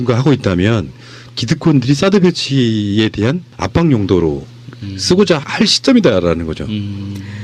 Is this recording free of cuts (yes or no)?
yes